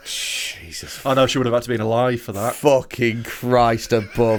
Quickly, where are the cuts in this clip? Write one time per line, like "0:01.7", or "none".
none